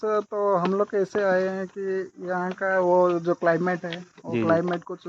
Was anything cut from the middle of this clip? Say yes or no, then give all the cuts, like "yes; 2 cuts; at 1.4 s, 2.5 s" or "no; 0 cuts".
no; 0 cuts